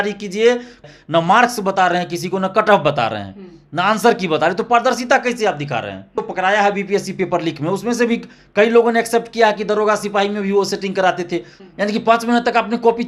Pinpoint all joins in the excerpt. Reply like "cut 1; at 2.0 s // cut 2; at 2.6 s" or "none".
cut 1; at 0.8 s // cut 2; at 6.2 s // cut 3; at 11.5 s

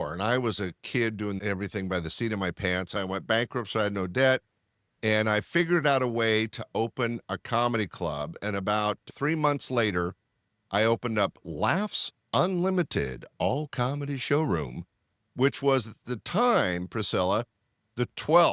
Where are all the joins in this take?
cut 1; at 3.0 s

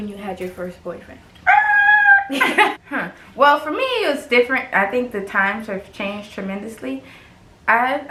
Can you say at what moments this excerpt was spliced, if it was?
none

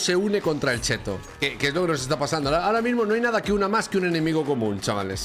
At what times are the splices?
cut 1; at 1.3 s

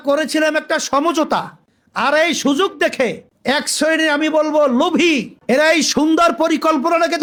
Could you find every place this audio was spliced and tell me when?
none

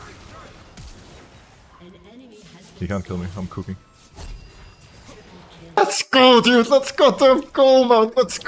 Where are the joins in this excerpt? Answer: cut 1; at 5.8 s

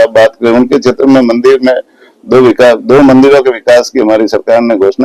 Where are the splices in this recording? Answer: none

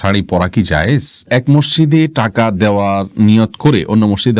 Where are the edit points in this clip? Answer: cut 1; at 1.2 s

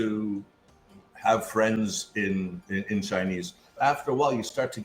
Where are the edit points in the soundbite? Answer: cut 1; at 3.8 s

